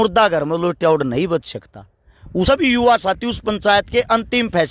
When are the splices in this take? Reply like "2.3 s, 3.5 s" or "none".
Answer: 2.5 s